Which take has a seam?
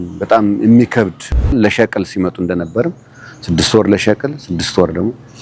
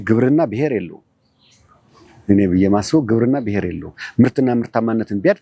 first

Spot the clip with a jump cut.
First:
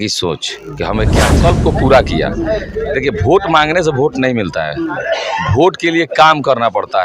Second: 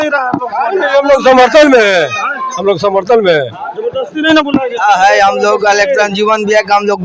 first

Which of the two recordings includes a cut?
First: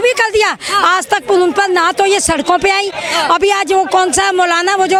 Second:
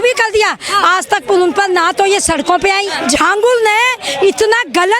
second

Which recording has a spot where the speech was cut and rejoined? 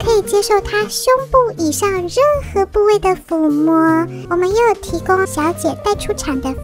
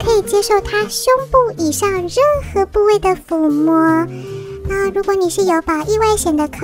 first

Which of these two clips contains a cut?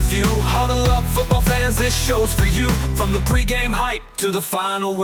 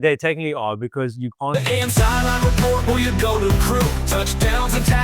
second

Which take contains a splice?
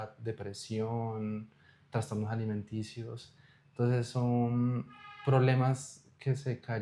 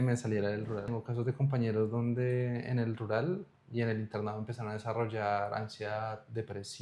second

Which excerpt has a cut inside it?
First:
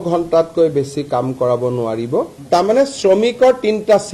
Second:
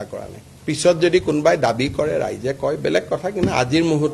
first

